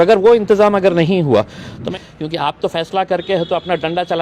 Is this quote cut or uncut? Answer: cut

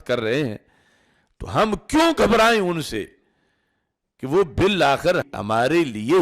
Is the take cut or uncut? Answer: cut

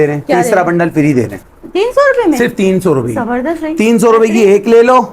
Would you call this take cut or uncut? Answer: cut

